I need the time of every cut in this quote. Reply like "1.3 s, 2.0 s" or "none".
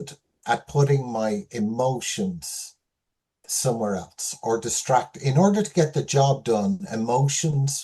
none

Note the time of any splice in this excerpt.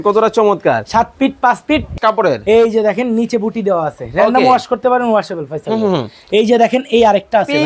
1.9 s

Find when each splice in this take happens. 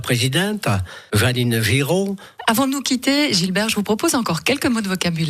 none

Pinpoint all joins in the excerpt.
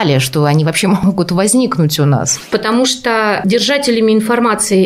1.0 s, 2.5 s

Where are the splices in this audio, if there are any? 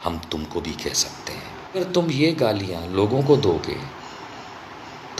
1.8 s

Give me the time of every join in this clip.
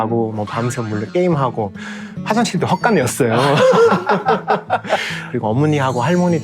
5.2 s

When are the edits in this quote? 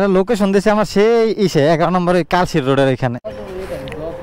none

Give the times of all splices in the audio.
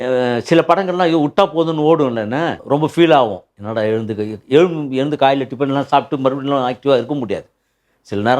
2.6 s

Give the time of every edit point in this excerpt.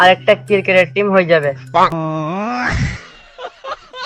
1.9 s

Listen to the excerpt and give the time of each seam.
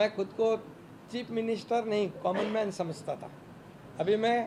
none

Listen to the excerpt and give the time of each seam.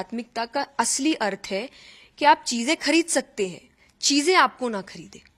none

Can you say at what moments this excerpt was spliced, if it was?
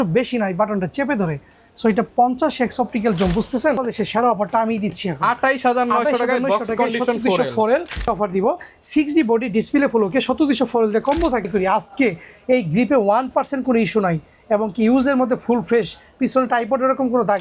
3.8 s, 8.0 s, 11.5 s

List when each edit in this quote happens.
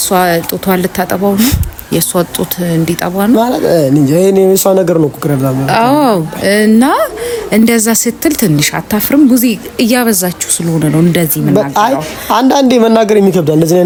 none

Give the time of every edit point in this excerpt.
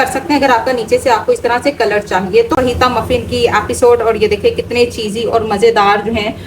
2.5 s

